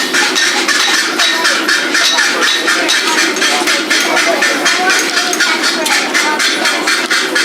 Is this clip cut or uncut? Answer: uncut